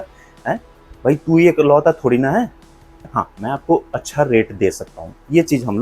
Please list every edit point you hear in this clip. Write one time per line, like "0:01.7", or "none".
0:03.1